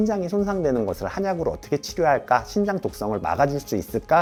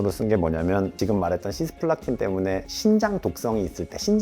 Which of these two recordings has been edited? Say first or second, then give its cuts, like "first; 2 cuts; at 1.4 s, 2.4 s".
second; 1 cut; at 0.9 s